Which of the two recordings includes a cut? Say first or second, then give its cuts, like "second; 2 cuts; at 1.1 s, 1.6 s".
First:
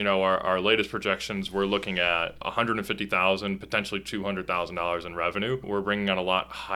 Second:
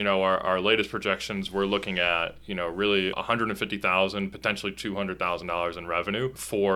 first; 2 cuts; at 2.4 s, 5.6 s